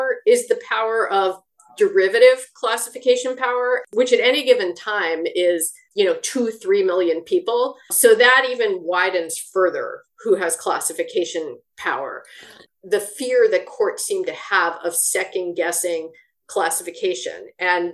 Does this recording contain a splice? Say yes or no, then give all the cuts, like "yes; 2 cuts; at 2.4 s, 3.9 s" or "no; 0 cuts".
yes; 4 cuts; at 3.8 s, 5.8 s, 7.9 s, 12.5 s